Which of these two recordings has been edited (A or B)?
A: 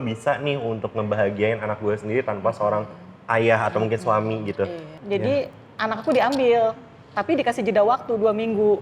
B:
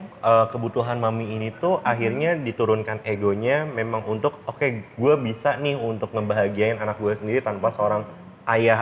A